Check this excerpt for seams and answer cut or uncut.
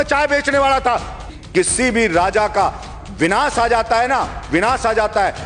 cut